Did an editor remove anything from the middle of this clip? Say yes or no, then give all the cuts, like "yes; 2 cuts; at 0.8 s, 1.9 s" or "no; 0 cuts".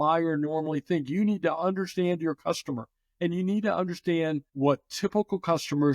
yes; 1 cut; at 4.5 s